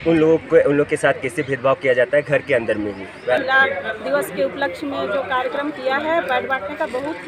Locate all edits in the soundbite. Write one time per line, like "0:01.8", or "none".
0:03.4